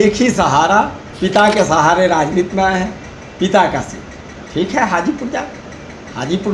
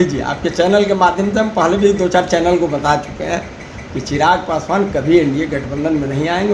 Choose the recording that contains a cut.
first; 1 cut; at 1.1 s

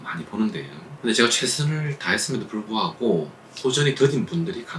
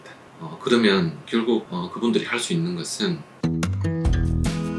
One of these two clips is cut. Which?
second; 1 cut; at 3.3 s

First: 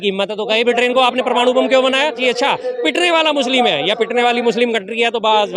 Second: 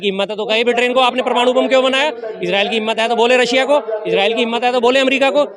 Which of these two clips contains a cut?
first; 1 cut; at 2.2 s

